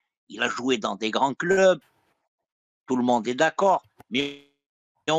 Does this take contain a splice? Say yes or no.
no